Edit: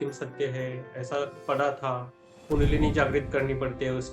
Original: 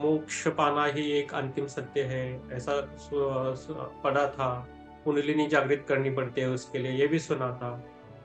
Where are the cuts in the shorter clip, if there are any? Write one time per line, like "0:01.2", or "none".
0:01.4